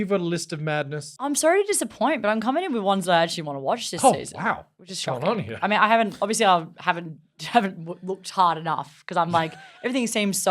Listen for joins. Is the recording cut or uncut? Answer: cut